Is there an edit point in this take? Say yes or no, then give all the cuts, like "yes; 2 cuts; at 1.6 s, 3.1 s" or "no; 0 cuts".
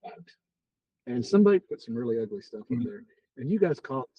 yes; 1 cut; at 1.8 s